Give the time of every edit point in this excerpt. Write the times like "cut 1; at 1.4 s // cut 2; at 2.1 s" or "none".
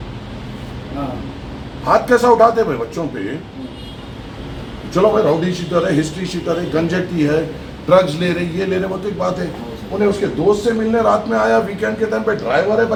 none